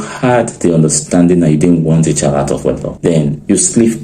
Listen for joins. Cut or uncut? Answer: cut